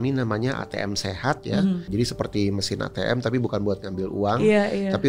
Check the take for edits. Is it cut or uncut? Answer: cut